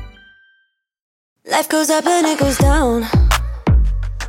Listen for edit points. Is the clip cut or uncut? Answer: cut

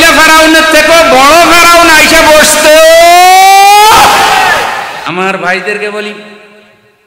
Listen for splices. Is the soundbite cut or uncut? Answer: cut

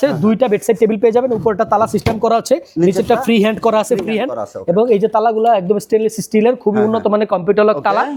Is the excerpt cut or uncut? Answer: uncut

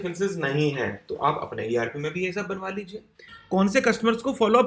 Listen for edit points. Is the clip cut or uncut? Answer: cut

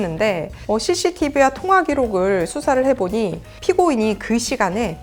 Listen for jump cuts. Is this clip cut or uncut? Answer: uncut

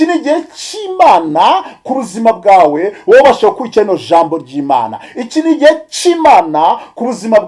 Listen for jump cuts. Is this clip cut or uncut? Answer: uncut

